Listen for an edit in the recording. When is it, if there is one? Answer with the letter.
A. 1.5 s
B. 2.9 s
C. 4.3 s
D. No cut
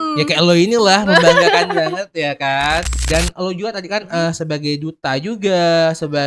B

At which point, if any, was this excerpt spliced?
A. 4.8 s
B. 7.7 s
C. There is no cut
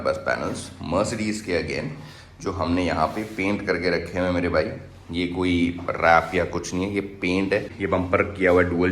B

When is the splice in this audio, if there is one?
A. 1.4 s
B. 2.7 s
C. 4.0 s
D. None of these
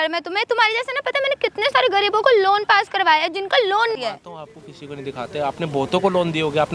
C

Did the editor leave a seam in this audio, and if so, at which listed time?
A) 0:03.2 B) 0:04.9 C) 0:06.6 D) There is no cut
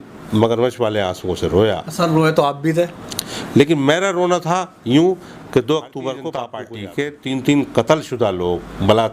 C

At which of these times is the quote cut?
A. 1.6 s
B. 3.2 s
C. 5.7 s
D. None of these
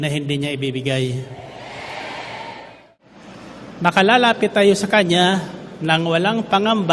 B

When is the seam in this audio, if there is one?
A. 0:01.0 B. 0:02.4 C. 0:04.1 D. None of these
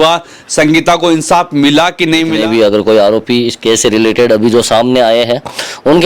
B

